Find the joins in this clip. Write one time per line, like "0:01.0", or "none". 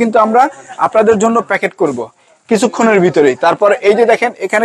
none